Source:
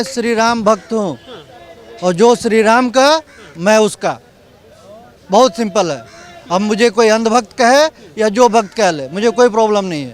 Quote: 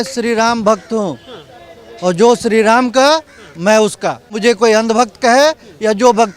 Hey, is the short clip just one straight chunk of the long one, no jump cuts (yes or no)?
no